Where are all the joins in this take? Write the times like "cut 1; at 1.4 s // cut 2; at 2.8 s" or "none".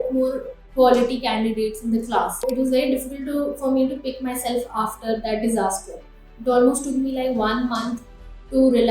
cut 1; at 2.5 s

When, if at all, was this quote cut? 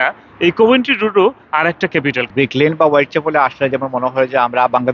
cut 1; at 2.2 s

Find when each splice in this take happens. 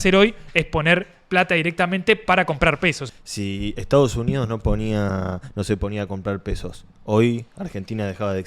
cut 1; at 3.0 s

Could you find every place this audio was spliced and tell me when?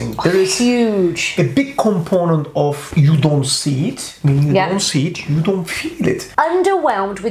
cut 1; at 2.8 s // cut 2; at 6.2 s

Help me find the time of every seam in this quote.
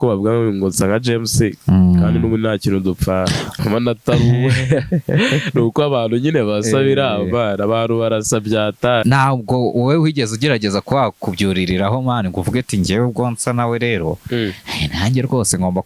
cut 1; at 3.5 s // cut 2; at 9.0 s

